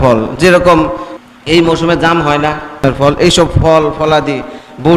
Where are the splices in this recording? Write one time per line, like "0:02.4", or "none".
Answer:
0:01.1
0:02.8

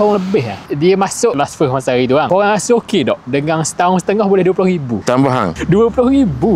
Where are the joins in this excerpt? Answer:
0:02.3

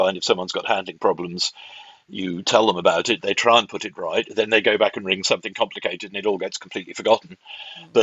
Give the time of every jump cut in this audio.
none

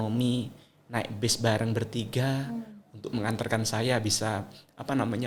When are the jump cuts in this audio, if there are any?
none

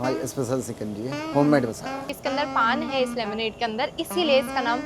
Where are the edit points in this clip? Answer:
0:02.1

